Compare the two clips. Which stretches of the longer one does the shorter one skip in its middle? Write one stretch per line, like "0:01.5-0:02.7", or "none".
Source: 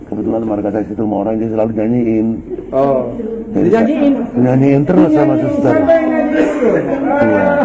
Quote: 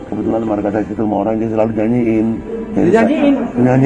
0:02.5-0:03.3